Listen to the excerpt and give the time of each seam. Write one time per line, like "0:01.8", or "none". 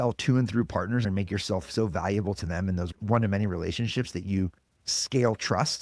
0:01.0
0:02.9